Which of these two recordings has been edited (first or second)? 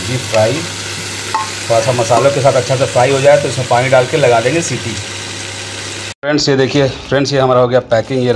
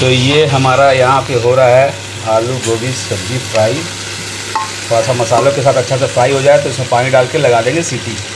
first